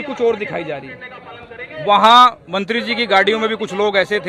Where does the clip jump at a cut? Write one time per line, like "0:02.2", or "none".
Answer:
none